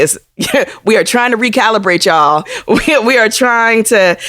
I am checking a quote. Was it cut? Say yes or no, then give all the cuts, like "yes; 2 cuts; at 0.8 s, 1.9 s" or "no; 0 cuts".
yes; 1 cut; at 2.5 s